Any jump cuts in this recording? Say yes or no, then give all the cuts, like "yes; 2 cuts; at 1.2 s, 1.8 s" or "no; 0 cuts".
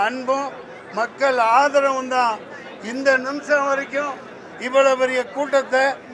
no; 0 cuts